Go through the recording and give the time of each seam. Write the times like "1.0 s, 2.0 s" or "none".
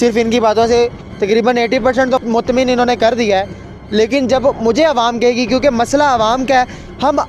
2.2 s